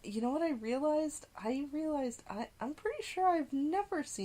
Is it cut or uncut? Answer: uncut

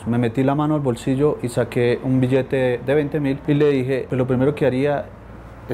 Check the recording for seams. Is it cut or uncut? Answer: cut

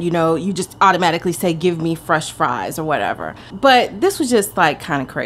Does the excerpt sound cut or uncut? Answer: uncut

